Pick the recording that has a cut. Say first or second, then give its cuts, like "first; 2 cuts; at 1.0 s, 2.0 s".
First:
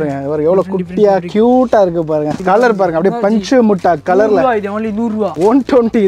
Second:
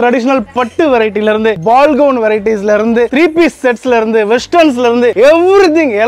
first; 2 cuts; at 2.4 s, 5.3 s